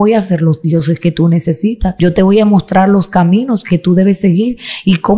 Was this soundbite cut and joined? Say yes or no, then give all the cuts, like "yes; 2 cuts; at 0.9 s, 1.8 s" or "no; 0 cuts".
yes; 1 cut; at 1.9 s